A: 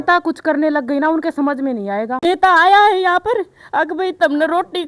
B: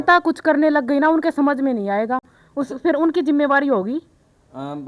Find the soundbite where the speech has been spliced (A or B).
A